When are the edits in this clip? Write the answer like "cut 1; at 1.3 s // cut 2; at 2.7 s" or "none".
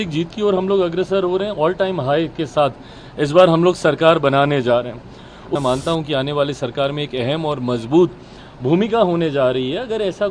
cut 1; at 5.5 s